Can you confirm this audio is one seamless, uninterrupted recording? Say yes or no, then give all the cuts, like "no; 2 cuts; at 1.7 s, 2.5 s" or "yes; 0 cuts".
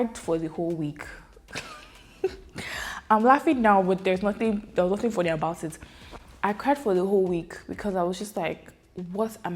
yes; 0 cuts